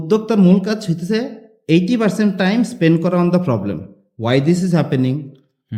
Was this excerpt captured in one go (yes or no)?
yes